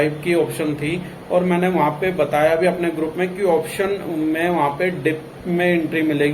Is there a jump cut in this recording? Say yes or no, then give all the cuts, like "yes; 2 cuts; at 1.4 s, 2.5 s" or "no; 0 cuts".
no; 0 cuts